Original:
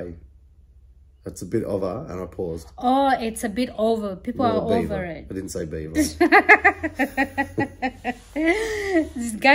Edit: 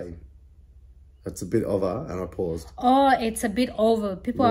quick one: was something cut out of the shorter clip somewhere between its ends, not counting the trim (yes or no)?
no